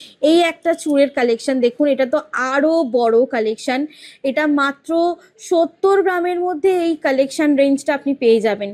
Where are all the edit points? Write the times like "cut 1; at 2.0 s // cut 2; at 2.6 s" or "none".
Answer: none

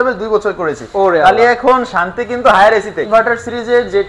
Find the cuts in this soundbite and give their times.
cut 1; at 3.0 s

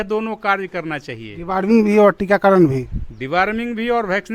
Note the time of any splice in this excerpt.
none

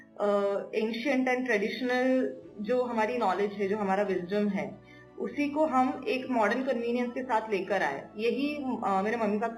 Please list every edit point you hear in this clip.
none

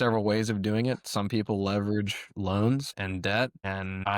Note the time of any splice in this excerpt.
cut 1; at 3.0 s

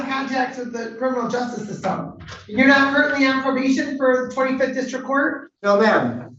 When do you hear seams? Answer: cut 1; at 5.5 s

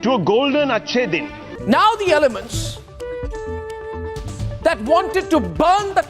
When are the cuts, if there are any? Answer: cut 1; at 1.5 s

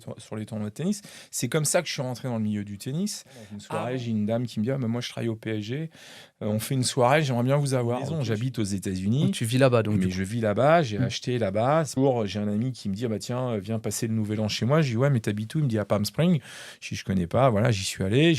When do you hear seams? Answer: cut 1; at 3.6 s // cut 2; at 8.2 s // cut 3; at 11.9 s

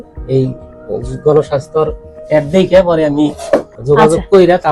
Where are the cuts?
cut 1; at 3.7 s

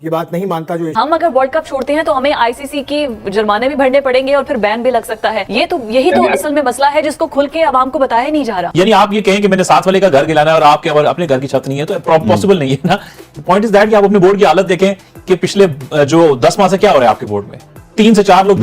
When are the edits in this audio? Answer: cut 1; at 0.9 s // cut 2; at 5.4 s // cut 3; at 8.6 s

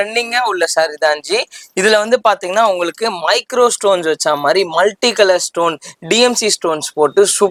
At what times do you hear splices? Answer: none

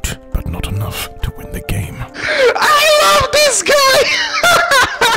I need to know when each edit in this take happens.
none

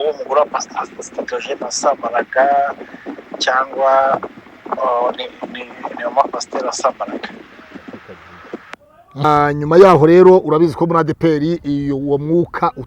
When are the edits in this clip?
cut 1; at 9.2 s

